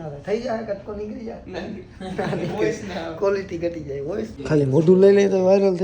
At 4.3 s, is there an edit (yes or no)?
yes